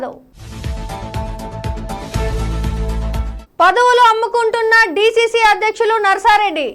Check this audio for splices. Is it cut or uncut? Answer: uncut